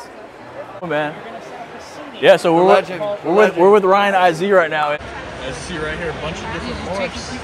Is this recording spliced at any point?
yes; 2 cuts; at 0.9 s, 5.0 s

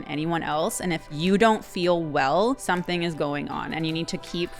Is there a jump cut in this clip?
yes; 2 cuts; at 1.1 s, 2.6 s

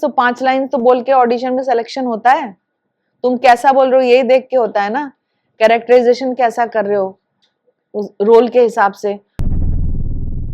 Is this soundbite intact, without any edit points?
no; 1 cut; at 9.3 s

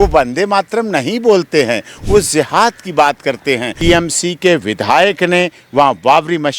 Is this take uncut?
no; 1 cut; at 3.7 s

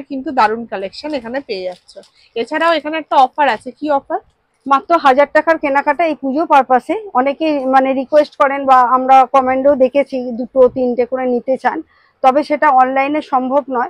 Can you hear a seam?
no; 0 cuts

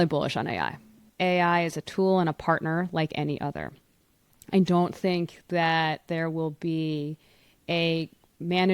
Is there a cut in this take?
yes; 1 cut; at 1.0 s

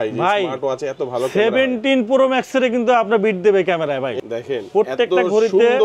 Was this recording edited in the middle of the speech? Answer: yes; 1 cut; at 4.2 s

